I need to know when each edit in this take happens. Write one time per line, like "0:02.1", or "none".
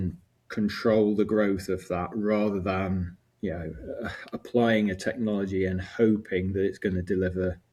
none